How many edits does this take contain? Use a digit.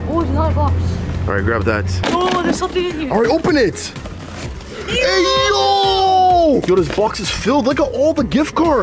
2